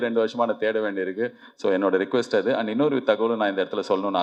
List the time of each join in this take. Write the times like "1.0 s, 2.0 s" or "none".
none